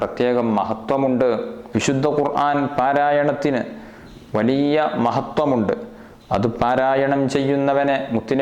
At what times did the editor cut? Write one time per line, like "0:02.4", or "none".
0:01.6